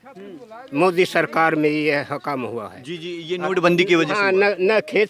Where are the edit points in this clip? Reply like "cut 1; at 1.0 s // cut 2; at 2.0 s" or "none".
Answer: none